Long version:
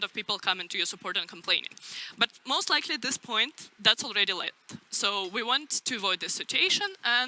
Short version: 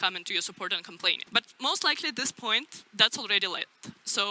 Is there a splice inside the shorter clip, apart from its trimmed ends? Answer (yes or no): yes